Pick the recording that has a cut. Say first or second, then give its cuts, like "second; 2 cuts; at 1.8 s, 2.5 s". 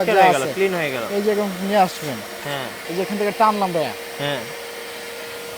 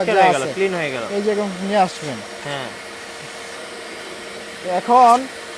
first; 1 cut; at 2.8 s